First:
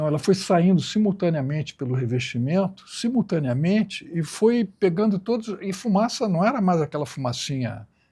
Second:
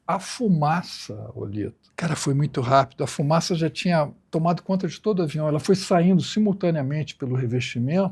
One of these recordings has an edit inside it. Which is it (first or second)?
second